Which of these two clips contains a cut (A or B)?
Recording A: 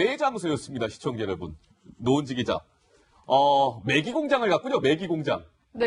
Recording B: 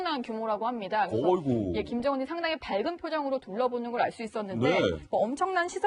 A